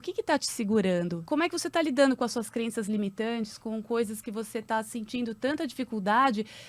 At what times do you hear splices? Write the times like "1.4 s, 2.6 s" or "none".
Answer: 1.2 s